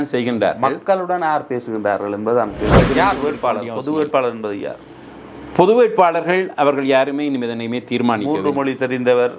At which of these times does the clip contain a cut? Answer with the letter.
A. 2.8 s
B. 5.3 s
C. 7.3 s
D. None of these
A